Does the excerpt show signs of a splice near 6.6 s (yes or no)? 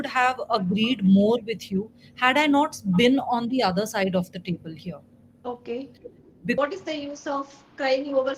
yes